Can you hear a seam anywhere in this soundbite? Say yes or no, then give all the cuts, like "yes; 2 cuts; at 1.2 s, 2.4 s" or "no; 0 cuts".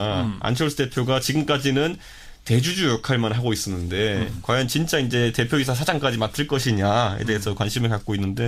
yes; 1 cut; at 2.4 s